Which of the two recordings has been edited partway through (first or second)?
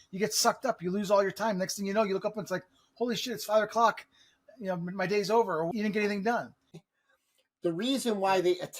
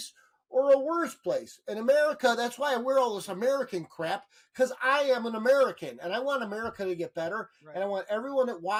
first